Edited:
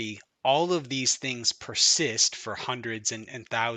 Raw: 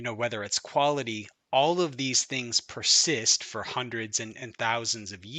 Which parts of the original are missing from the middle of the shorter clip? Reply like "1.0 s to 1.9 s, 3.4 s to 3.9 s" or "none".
none